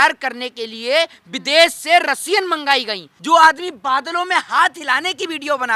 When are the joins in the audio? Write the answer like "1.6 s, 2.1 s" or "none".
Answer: 3.1 s